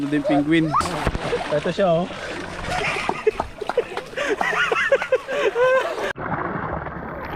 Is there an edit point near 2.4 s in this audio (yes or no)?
no